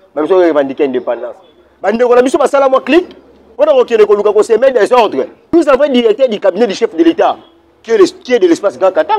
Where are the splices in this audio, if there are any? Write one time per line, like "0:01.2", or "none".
0:05.3